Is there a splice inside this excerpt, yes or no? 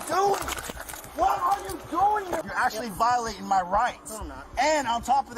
yes